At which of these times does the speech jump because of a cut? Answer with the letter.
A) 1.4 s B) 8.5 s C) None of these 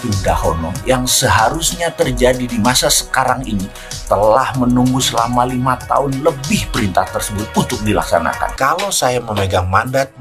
B